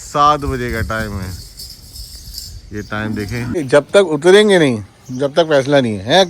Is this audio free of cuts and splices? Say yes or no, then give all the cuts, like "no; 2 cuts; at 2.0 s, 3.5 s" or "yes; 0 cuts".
no; 1 cut; at 3.6 s